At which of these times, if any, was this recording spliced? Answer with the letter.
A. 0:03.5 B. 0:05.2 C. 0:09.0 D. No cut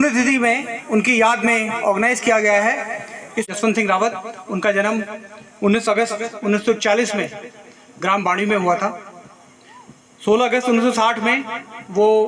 A